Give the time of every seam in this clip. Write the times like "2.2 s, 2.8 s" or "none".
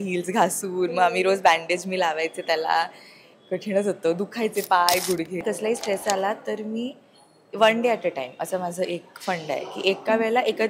5.4 s